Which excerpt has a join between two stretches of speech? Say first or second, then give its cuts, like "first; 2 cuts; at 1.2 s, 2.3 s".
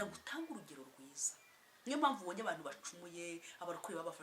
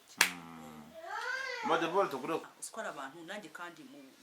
second; 1 cut; at 2.5 s